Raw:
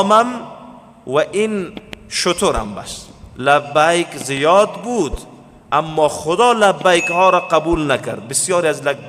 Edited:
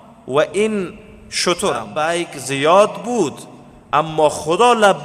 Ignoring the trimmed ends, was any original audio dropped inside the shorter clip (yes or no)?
yes